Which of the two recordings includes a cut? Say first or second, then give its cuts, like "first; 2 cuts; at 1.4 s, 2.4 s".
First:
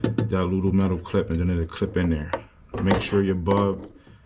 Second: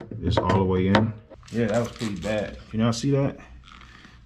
second; 1 cut; at 1.2 s